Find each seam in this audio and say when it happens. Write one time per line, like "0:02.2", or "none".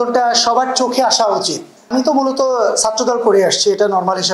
0:01.7